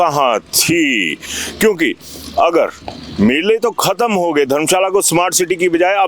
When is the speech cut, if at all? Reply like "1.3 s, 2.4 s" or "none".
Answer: none